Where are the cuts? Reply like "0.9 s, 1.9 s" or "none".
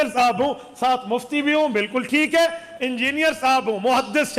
none